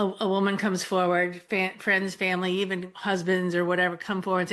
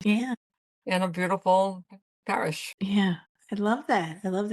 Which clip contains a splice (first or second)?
second